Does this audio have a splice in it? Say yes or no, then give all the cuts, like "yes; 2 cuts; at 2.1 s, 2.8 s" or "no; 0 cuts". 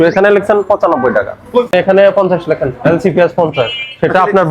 yes; 1 cut; at 1.7 s